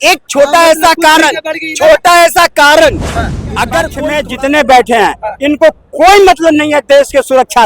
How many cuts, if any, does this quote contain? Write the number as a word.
one